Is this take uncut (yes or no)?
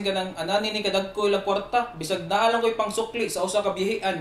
yes